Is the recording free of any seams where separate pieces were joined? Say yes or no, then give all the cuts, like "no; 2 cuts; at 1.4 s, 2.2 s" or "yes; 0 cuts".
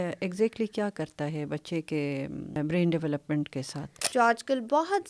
no; 2 cuts; at 2.6 s, 3.9 s